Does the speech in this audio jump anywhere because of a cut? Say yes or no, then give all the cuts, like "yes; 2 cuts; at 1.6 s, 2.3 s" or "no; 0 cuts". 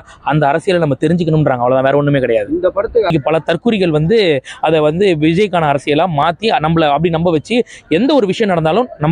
yes; 1 cut; at 3.1 s